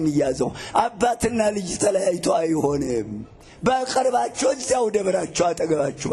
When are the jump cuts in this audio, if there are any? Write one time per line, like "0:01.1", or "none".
none